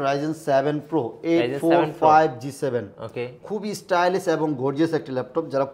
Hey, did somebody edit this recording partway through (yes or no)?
no